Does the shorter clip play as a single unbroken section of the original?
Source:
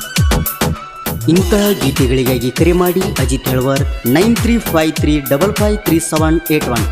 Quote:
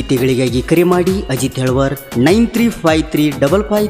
yes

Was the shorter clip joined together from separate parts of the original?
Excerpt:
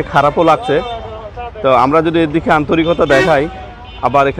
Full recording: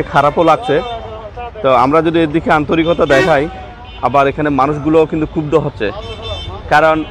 no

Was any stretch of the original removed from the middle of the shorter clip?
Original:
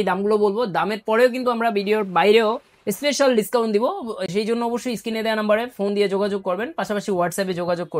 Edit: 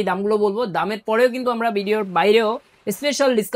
no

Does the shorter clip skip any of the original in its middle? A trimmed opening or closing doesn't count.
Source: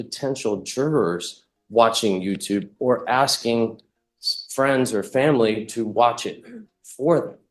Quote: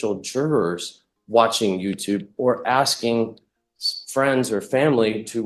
no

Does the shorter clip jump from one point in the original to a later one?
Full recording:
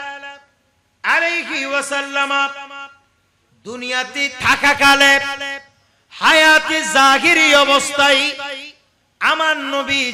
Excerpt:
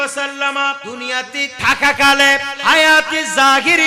yes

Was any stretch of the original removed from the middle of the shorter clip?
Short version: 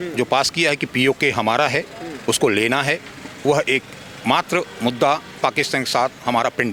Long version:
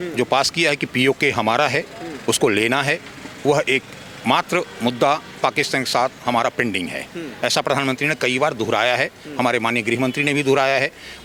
no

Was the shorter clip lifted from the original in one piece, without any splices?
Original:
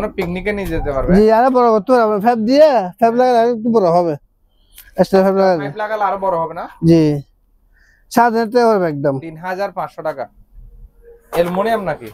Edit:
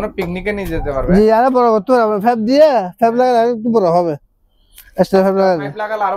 yes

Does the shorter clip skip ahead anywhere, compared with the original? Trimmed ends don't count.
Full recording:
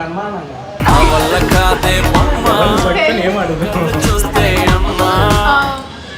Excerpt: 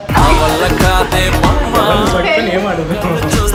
no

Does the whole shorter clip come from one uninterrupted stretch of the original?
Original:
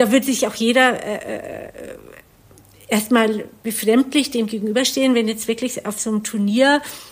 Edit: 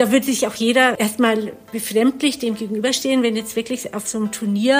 no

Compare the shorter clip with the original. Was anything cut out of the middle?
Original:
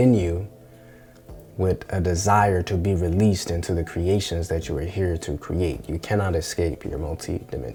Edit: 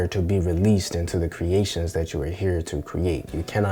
no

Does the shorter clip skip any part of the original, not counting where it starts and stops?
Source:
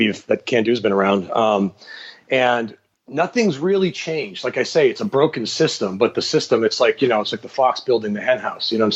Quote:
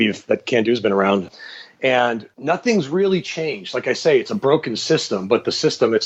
yes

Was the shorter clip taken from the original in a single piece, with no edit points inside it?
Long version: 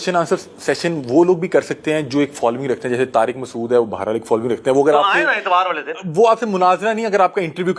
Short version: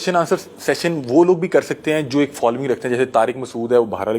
yes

